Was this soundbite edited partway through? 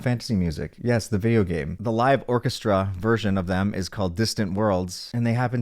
yes; 1 cut; at 1.7 s

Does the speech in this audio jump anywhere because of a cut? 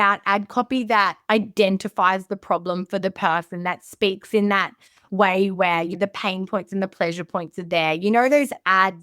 yes; 1 cut; at 5.9 s

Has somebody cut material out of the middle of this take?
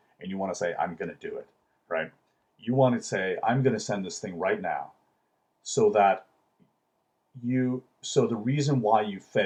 no; 0 cuts

